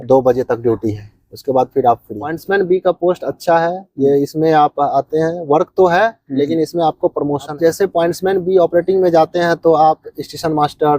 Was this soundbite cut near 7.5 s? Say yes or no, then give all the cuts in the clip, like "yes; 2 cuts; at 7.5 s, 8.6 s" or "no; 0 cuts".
yes; 2 cuts; at 2.4 s, 7.5 s